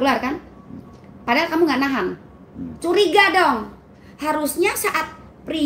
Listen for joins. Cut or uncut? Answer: uncut